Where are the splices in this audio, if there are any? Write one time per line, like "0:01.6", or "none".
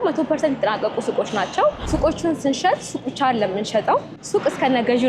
0:01.8
0:04.2